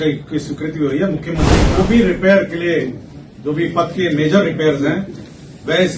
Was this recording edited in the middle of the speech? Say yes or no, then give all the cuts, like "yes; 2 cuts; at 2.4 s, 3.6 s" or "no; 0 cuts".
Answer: yes; 1 cut; at 1.7 s